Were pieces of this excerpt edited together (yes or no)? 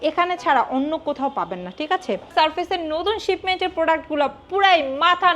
yes